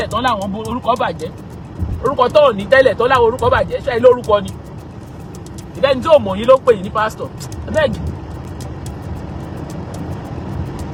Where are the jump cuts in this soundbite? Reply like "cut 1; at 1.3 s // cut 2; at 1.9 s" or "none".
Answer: none